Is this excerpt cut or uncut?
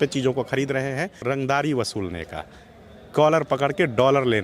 cut